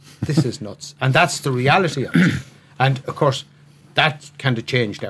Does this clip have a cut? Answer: yes; 1 cut; at 3.8 s

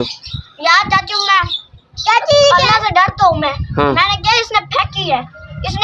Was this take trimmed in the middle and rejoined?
yes; 1 cut; at 3.6 s

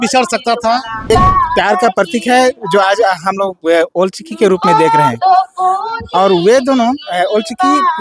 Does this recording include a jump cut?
yes; 1 cut; at 1.1 s

